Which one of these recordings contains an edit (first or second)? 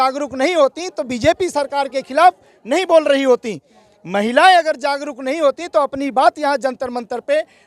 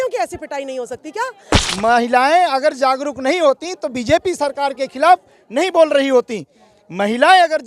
second